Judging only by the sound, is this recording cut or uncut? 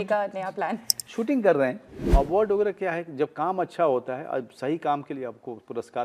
cut